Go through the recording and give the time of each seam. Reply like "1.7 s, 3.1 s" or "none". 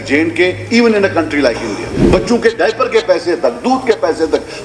1.9 s